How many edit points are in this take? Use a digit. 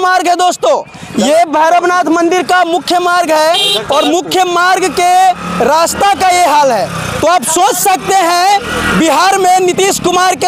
0